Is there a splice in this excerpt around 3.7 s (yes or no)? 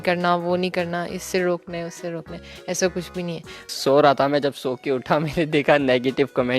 yes